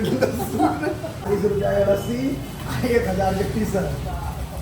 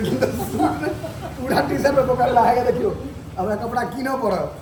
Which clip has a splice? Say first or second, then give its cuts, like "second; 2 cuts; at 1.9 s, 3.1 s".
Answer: first; 1 cut; at 1.1 s